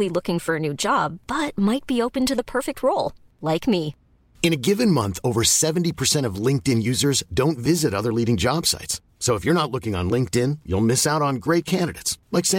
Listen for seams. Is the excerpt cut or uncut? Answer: uncut